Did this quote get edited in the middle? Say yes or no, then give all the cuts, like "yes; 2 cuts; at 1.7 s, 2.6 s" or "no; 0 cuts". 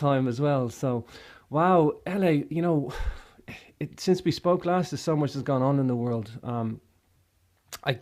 no; 0 cuts